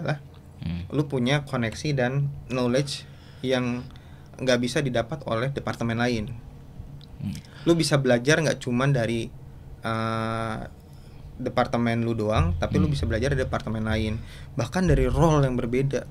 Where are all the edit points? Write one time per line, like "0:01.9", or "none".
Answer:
none